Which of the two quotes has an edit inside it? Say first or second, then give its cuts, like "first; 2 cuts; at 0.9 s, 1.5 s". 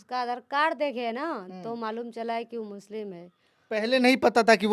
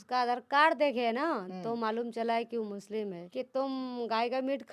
second; 1 cut; at 3.2 s